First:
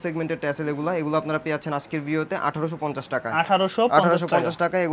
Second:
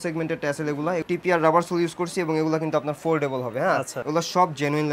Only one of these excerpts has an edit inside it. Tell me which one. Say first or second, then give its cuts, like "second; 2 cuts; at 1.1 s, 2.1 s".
second; 2 cuts; at 1.0 s, 4.0 s